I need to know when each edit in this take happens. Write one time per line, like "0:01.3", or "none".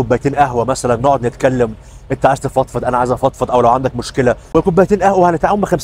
0:04.4

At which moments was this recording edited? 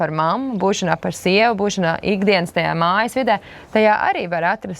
none

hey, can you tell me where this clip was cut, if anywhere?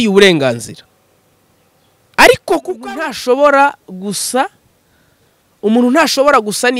0:02.8

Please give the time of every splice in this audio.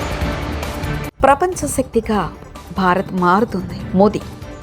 0:01.1

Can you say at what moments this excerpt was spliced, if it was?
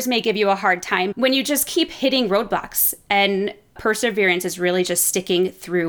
0:01.1
0:03.8

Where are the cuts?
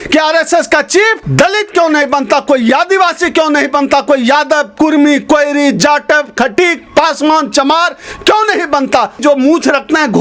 0:01.2
0:09.2

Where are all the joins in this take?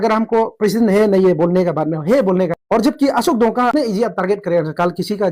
0:02.6
0:03.7

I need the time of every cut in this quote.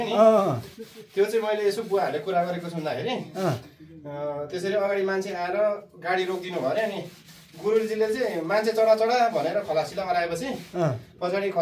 none

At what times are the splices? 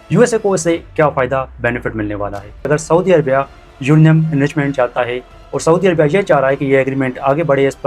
0:02.7

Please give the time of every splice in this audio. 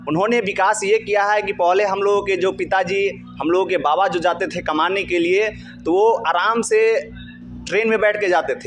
none

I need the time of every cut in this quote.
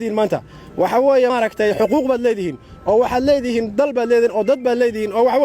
0:01.3

